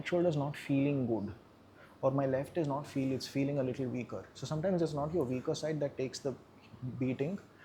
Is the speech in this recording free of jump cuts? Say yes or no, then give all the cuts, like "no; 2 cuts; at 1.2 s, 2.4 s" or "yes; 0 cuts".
yes; 0 cuts